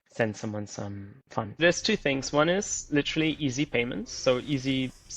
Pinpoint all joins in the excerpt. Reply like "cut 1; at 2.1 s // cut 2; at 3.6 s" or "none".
cut 1; at 1.6 s